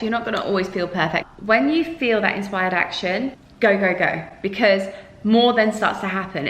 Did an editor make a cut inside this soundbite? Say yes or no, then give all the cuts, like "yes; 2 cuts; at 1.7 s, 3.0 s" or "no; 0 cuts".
yes; 2 cuts; at 1.3 s, 3.4 s